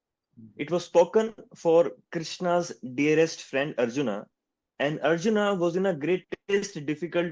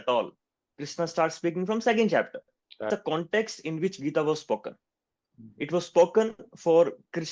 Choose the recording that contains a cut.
second; 1 cut; at 2.9 s

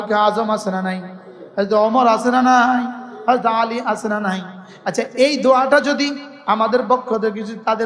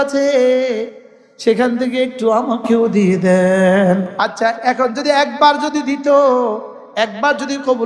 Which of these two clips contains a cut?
second; 1 cut; at 4.1 s

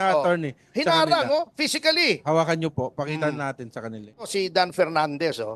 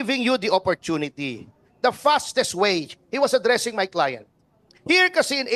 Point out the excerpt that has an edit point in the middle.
first; 1 cut; at 4.3 s

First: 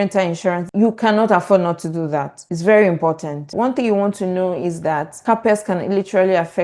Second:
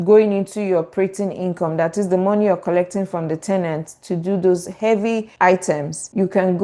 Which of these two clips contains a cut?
first; 1 cut; at 3.5 s

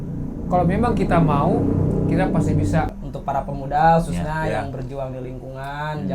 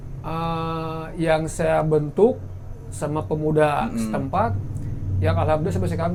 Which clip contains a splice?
first; 1 cut; at 3.0 s

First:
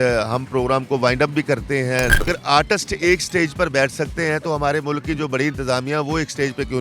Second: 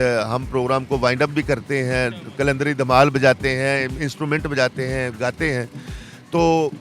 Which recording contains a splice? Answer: first; 1 cut; at 2.3 s

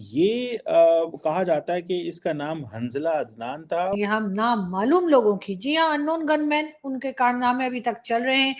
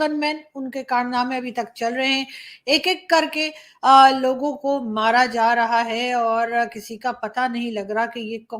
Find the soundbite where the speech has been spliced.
first; 1 cut; at 4.0 s

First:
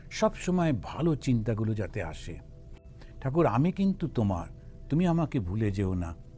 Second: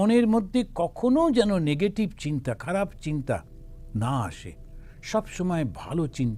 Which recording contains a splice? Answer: first; 1 cut; at 2.9 s

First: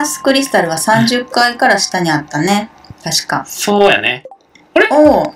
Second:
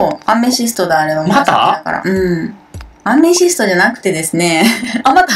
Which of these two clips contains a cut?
first; 1 cut; at 4.1 s

